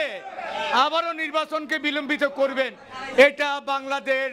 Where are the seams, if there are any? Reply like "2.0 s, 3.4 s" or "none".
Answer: none